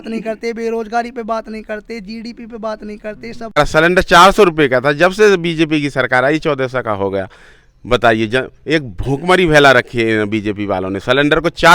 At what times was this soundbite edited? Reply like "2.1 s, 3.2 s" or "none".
3.6 s

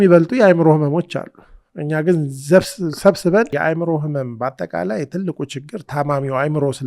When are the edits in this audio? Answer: 3.5 s

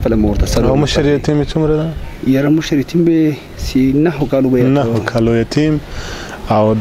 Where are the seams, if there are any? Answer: none

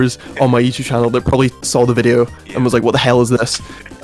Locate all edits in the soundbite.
1.7 s

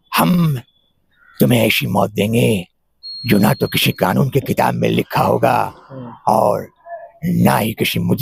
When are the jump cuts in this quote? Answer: none

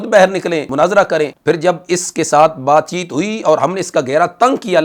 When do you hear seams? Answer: 0.9 s

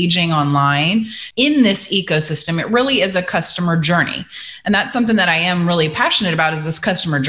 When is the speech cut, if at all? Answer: 1.2 s

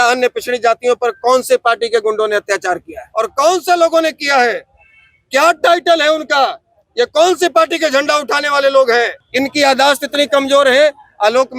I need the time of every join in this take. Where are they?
3.0 s, 9.2 s

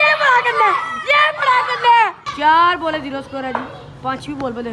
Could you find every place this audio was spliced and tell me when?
2.2 s

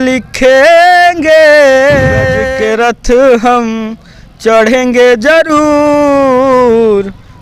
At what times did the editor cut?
2.4 s

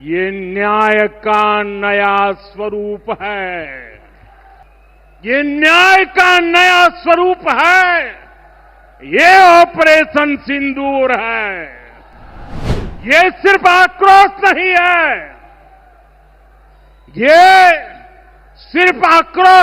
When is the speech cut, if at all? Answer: 4.6 s, 12.8 s

